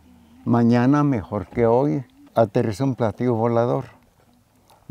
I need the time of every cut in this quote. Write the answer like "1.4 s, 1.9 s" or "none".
2.2 s